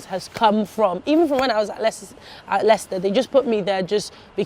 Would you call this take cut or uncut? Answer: uncut